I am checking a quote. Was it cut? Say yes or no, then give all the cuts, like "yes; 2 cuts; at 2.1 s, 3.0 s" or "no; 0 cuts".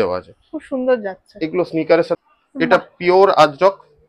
yes; 1 cut; at 2.2 s